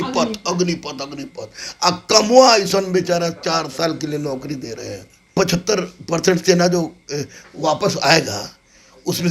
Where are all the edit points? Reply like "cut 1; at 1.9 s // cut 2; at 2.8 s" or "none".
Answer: cut 1; at 5.4 s